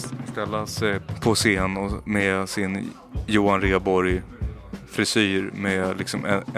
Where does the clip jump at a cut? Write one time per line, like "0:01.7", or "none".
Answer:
0:01.1